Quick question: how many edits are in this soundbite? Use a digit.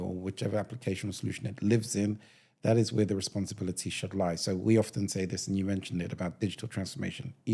0